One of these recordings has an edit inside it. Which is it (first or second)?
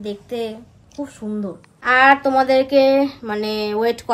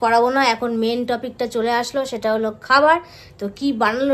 first